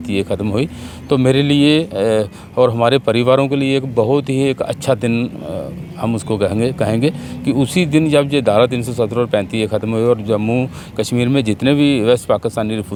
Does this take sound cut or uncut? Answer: uncut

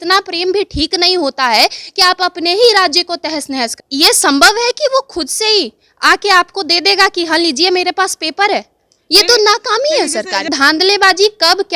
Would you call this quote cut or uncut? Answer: cut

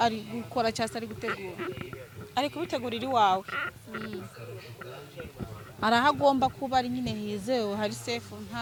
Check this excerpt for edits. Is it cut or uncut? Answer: uncut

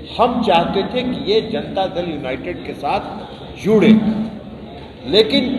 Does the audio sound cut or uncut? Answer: uncut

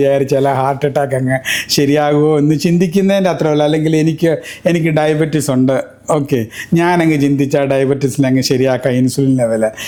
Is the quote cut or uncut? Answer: uncut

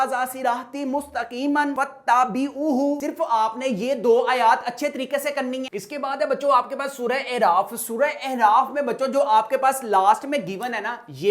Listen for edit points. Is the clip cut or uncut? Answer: uncut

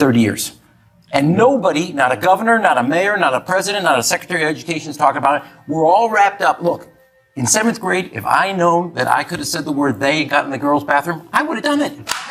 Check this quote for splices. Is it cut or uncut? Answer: uncut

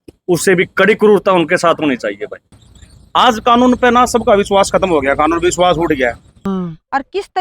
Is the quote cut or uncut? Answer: cut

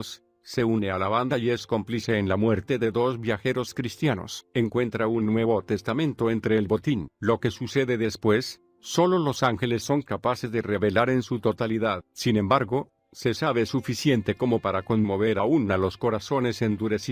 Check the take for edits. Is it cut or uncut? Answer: uncut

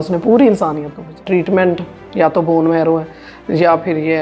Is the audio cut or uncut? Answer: cut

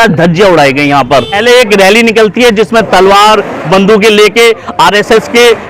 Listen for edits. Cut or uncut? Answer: cut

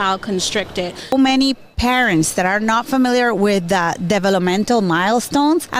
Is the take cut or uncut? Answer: cut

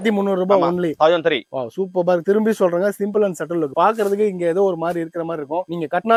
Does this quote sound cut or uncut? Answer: uncut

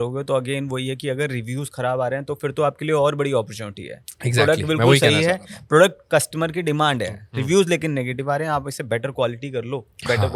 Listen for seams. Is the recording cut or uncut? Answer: uncut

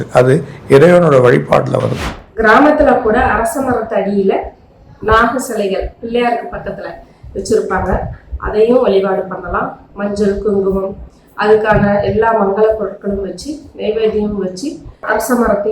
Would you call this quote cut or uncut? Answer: cut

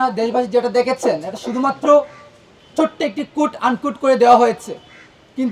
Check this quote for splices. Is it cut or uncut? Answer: uncut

